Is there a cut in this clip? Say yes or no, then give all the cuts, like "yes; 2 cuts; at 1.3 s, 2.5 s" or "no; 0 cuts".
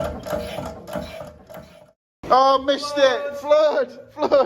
yes; 1 cut; at 2.2 s